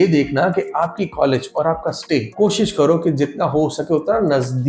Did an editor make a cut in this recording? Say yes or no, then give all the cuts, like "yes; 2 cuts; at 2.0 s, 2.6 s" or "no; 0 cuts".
no; 0 cuts